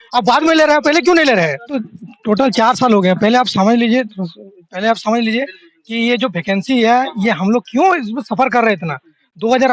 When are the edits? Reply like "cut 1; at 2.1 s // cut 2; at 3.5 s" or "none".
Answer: cut 1; at 1.8 s